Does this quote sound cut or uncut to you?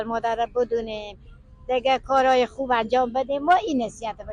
uncut